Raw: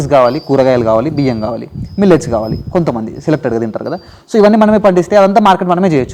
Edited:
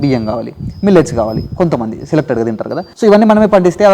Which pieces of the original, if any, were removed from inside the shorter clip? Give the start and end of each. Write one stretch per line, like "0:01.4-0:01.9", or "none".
0:04.0-0:04.2